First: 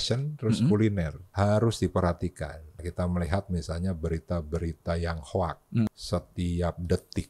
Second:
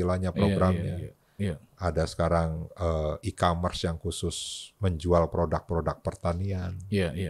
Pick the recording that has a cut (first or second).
first